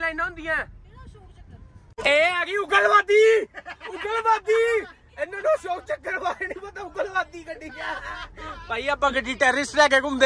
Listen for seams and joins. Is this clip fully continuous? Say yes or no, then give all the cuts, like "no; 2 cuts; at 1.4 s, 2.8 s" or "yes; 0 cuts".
no; 1 cut; at 2.0 s